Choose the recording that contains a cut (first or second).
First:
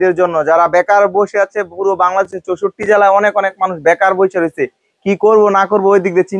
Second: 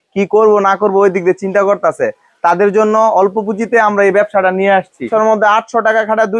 second